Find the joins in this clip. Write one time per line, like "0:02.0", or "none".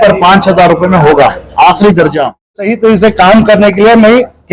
0:02.7